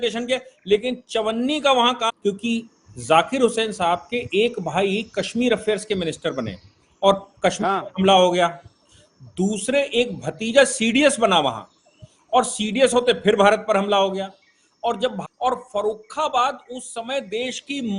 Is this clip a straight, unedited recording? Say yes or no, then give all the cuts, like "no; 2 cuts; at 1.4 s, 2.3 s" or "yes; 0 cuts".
no; 2 cuts; at 2.1 s, 15.2 s